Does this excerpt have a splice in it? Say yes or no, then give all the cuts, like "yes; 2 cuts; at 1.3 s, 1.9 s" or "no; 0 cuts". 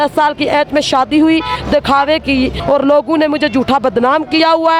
yes; 1 cut; at 2.6 s